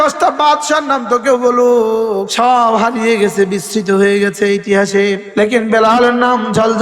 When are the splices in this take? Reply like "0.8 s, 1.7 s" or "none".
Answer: 2.3 s, 5.2 s